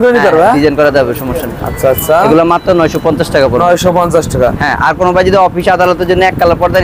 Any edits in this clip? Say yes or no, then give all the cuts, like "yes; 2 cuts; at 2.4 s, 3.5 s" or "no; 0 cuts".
no; 0 cuts